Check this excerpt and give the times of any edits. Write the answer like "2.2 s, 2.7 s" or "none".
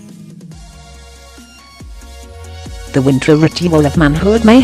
2.9 s